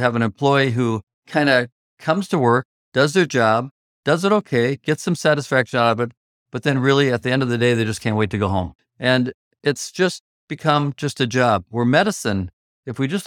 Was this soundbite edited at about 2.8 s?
yes; 4 cuts; at 1.1 s, 2.8 s, 8.8 s, 9.5 s

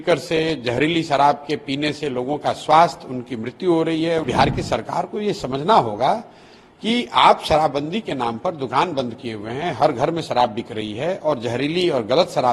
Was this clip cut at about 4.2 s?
yes; 1 cut; at 4.2 s

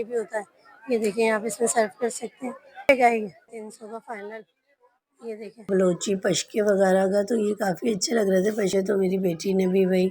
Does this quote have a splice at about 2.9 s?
yes; 3 cuts; at 2.9 s, 5.7 s, 8.7 s

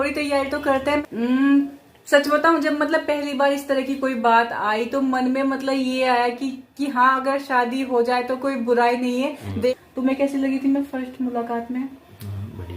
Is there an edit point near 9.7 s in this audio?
yes; 2 cuts; at 1.0 s, 9.7 s

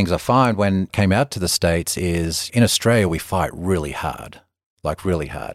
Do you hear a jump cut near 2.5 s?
yes; 2 cuts; at 0.9 s, 2.5 s

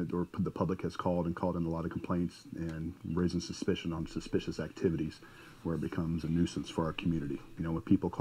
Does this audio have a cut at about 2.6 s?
yes; 1 cut; at 2.6 s

